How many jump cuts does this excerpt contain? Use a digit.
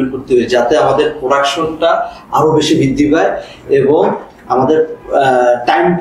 0